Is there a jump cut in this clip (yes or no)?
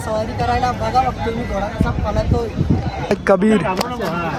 no